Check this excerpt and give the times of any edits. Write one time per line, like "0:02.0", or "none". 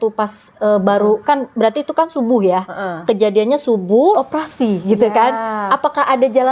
0:04.1